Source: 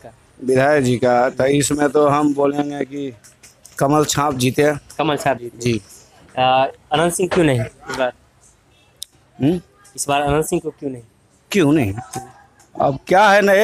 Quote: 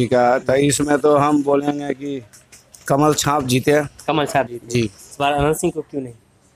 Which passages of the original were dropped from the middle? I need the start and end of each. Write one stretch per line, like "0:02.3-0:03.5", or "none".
0:05.9-0:09.9